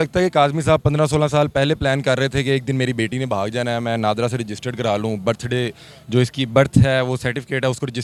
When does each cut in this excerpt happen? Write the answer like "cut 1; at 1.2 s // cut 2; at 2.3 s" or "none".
none